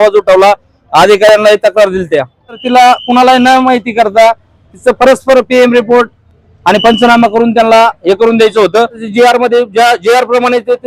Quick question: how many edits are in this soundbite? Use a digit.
2